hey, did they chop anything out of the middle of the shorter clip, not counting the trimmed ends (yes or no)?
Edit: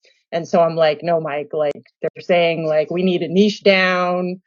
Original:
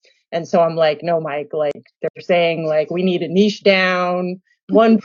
no